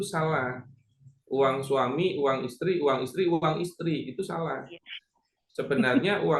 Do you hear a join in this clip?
no; 0 cuts

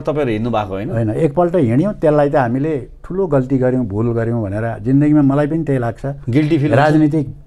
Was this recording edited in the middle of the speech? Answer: no; 0 cuts

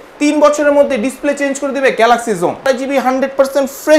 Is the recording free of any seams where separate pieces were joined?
no; 1 cut; at 2.6 s

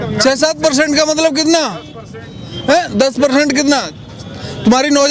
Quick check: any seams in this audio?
no; 0 cuts

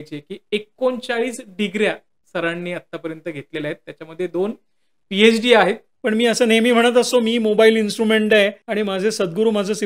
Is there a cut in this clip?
yes; 2 cuts; at 5.9 s, 8.6 s

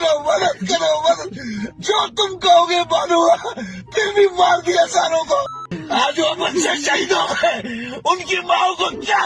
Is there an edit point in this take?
yes; 1 cut; at 5.5 s

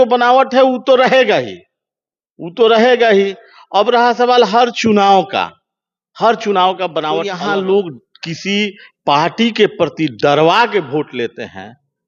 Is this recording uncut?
no; 1 cut; at 7.3 s

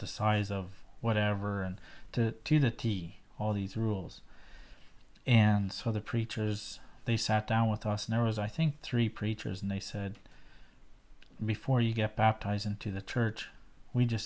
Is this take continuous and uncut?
yes; 0 cuts

